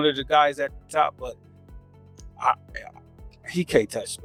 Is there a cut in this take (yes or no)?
no